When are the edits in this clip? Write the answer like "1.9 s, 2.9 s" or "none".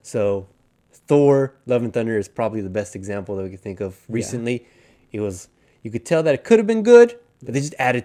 none